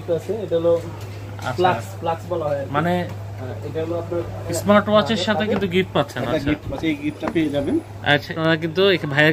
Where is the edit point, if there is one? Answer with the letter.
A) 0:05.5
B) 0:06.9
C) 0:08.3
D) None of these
C